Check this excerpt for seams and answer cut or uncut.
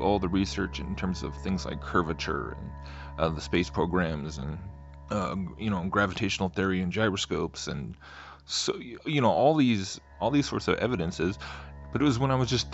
cut